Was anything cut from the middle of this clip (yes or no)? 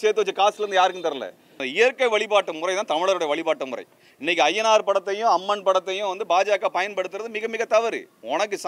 yes